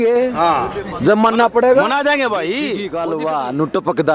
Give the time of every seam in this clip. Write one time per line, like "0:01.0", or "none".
0:02.8